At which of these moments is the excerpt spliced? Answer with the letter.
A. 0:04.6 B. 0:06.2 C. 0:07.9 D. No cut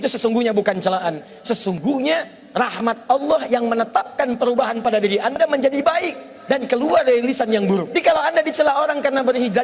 C